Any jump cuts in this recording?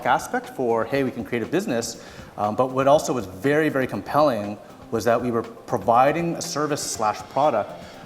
no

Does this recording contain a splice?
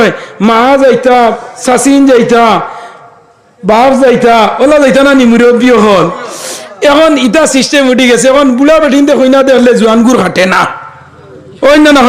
no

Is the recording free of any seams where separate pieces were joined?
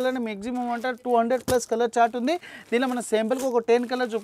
yes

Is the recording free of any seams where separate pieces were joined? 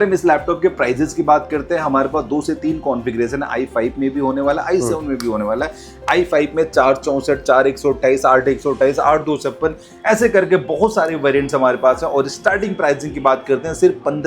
yes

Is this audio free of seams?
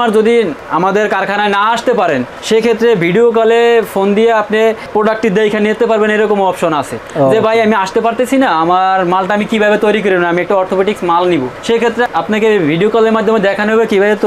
yes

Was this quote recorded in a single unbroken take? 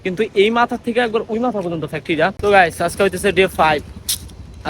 no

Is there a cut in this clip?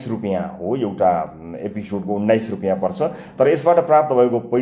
no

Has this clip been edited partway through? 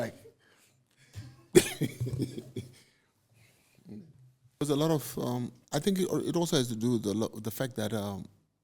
yes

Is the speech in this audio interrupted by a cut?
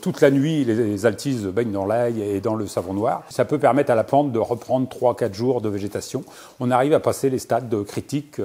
yes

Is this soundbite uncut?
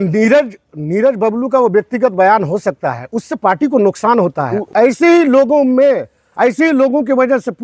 no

